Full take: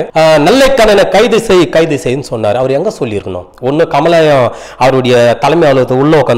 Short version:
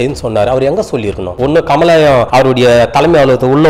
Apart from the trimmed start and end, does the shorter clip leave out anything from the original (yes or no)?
yes